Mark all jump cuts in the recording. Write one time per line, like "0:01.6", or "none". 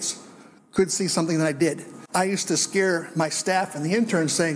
0:01.9